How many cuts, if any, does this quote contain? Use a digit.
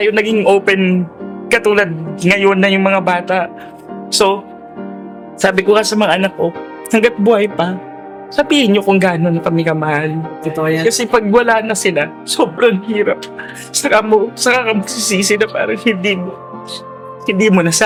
0